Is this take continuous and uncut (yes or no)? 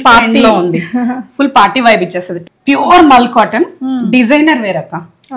no